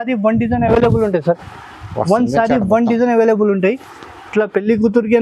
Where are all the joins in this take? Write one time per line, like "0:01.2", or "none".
none